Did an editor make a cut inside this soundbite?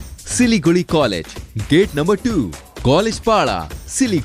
no; 0 cuts

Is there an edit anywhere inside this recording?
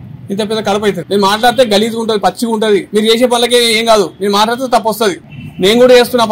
yes; 2 cuts; at 1.0 s, 2.9 s

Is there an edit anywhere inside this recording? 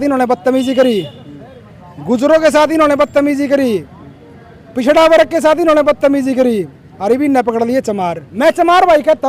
yes; 1 cut; at 8.2 s

